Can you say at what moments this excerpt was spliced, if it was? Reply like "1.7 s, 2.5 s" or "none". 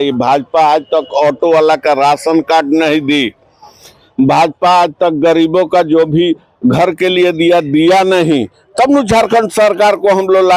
none